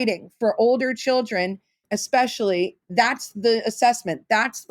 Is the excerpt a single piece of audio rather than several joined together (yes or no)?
no